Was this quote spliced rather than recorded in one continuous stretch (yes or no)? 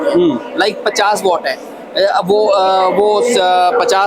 no